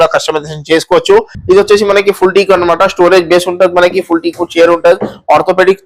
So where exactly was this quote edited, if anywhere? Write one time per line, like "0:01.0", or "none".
0:01.3